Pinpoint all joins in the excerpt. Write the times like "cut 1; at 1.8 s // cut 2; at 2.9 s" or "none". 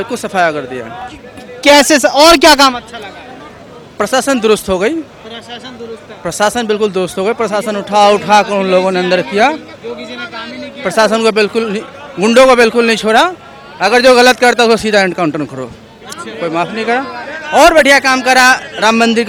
none